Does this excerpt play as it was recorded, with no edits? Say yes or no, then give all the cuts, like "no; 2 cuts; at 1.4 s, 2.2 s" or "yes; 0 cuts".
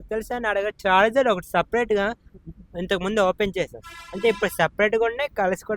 yes; 0 cuts